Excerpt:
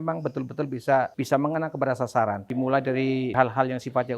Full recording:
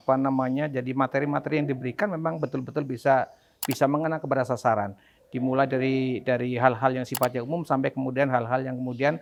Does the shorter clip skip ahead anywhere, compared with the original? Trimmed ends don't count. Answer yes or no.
yes